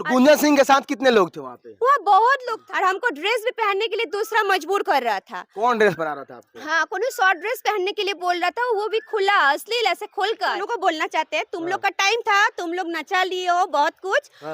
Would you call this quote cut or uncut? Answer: cut